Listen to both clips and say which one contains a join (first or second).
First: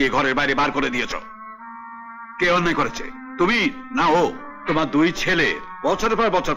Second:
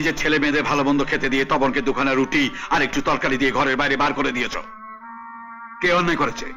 first